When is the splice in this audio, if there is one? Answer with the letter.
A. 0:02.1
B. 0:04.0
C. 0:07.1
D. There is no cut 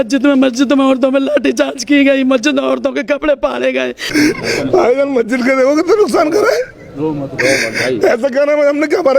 B